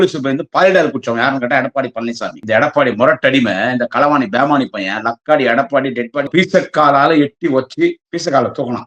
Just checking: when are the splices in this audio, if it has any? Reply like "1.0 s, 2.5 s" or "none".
2.4 s, 6.3 s